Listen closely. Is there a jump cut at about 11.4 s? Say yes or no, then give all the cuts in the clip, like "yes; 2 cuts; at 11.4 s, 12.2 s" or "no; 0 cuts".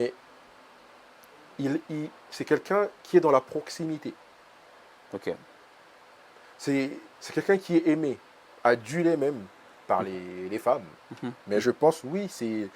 yes; 1 cut; at 11.4 s